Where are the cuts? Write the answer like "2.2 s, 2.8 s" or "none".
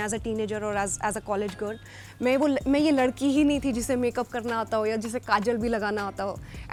none